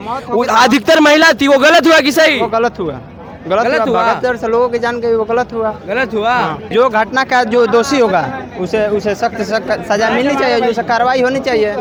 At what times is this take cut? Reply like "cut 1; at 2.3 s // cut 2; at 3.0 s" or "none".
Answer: none

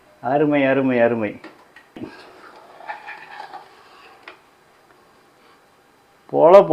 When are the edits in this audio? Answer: cut 1; at 2.2 s

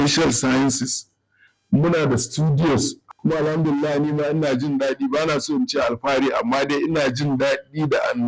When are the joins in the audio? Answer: cut 1; at 3.0 s

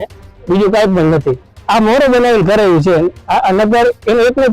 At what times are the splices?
cut 1; at 1.5 s

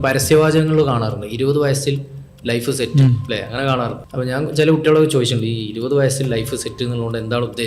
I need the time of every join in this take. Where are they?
cut 1; at 4.0 s

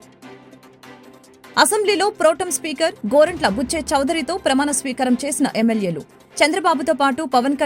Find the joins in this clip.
cut 1; at 1.5 s

